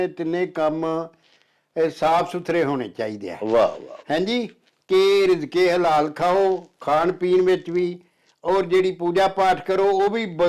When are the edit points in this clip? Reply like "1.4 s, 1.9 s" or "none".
none